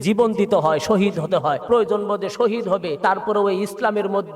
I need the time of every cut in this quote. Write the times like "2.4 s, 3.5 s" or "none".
1.6 s, 2.9 s